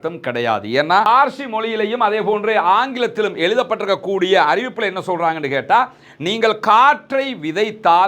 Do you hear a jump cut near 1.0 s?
yes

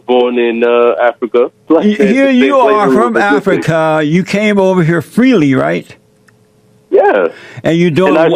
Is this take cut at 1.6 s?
yes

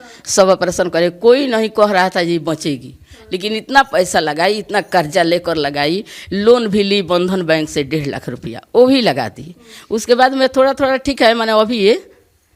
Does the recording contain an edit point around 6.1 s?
no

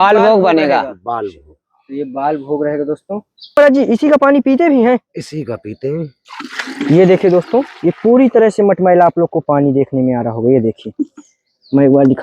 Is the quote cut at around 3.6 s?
yes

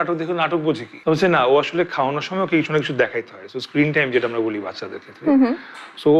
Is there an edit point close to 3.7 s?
no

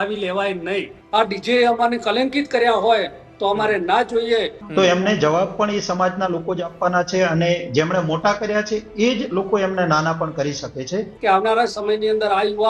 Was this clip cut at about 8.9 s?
no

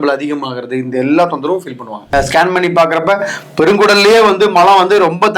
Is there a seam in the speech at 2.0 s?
yes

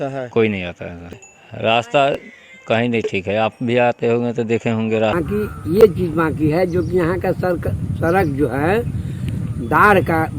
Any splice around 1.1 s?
yes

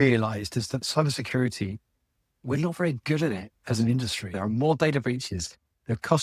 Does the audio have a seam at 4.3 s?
yes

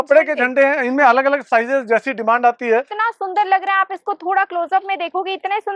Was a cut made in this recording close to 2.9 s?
yes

